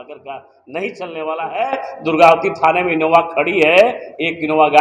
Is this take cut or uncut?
uncut